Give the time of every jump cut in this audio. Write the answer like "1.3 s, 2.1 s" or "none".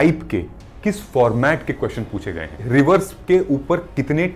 2.6 s